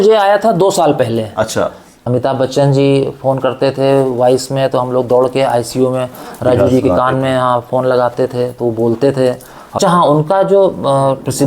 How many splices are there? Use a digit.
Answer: 2